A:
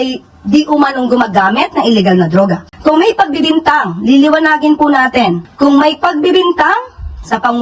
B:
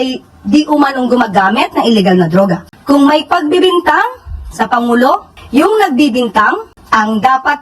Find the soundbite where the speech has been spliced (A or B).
B